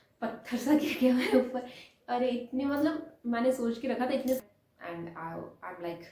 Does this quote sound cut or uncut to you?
cut